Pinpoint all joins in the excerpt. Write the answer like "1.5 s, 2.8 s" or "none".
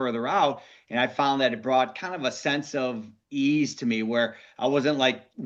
none